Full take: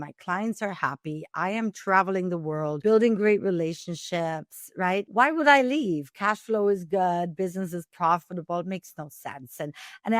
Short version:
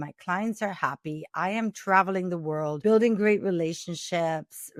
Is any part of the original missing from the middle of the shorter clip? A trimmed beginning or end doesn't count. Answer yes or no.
no